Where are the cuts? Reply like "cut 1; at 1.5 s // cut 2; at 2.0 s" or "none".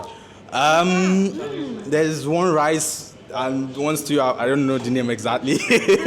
none